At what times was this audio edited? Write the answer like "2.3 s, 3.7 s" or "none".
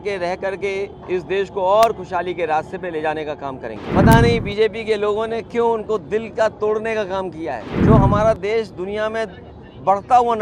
3.8 s, 7.7 s